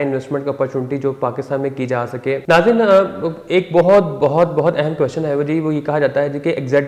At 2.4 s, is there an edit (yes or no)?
yes